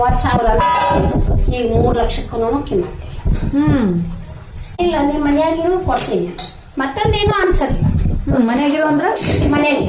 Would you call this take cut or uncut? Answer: cut